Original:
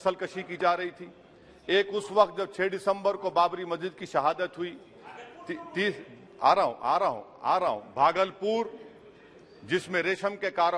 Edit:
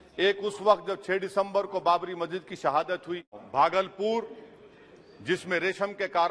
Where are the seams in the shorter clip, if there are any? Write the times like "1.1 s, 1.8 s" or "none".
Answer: 3.4 s